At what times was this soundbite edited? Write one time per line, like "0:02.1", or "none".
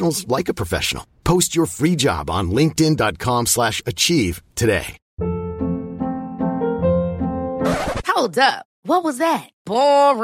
0:05.0